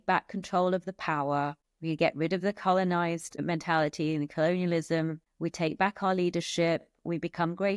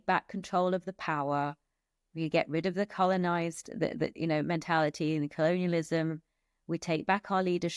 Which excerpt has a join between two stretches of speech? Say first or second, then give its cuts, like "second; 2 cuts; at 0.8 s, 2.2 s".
first; 3 cuts; at 1.7 s, 3.4 s, 5.2 s